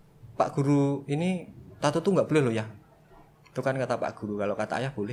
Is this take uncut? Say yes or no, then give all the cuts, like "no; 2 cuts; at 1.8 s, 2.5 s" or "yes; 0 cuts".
yes; 0 cuts